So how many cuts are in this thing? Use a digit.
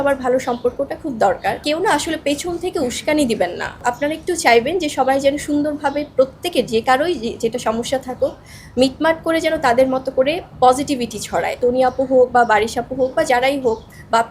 3